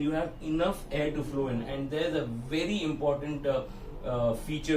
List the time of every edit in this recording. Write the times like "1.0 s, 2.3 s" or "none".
none